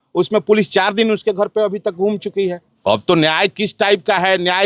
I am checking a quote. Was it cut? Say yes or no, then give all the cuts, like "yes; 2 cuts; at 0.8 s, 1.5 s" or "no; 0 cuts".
yes; 1 cut; at 2.7 s